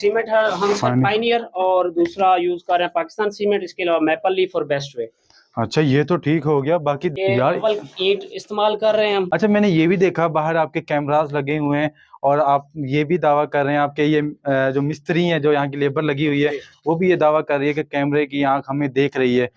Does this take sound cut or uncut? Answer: cut